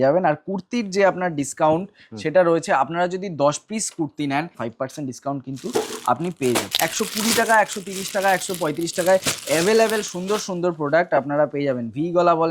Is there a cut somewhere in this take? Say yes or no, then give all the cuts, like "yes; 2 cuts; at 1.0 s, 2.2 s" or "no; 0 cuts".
yes; 2 cuts; at 4.6 s, 6.7 s